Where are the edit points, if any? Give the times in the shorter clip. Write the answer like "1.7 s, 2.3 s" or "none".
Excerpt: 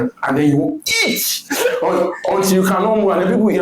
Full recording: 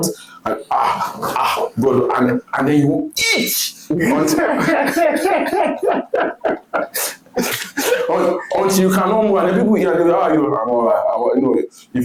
1.4 s